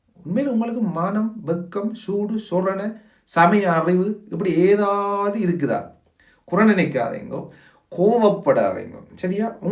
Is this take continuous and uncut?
yes; 0 cuts

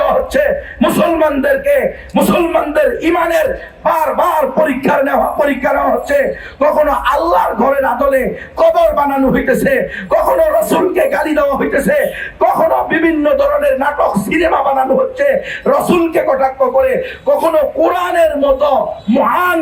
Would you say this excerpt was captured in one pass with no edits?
yes; 0 cuts

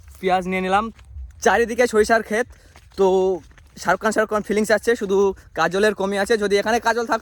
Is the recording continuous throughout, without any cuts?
no; 1 cut; at 0.9 s

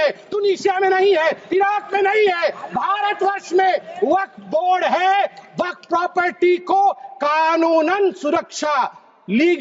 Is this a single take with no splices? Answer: yes; 0 cuts

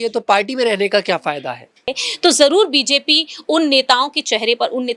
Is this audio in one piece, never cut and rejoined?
no; 1 cut; at 2.0 s

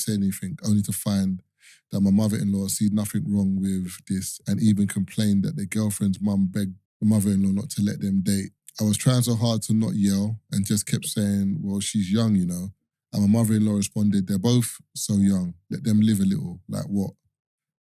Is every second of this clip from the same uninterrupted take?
no; 2 cuts; at 6.8 s, 8.6 s

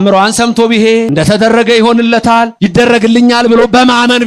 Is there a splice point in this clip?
yes; 2 cuts; at 1.1 s, 2.5 s

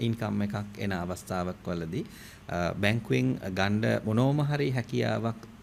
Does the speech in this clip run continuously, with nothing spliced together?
yes; 0 cuts

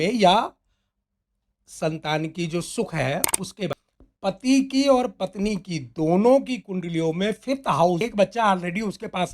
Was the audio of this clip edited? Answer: yes; 2 cuts; at 3.8 s, 8.0 s

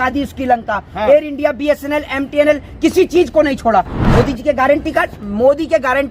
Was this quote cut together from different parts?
yes; 1 cut; at 3.9 s

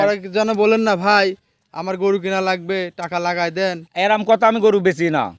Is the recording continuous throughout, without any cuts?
yes; 0 cuts

